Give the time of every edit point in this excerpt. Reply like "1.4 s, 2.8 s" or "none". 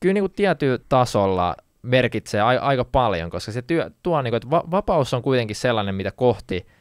0.8 s, 1.7 s